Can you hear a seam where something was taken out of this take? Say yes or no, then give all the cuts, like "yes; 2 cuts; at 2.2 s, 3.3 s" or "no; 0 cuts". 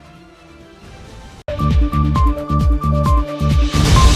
no; 0 cuts